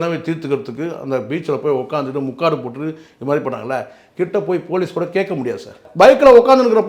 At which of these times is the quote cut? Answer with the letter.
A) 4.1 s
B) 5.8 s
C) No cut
B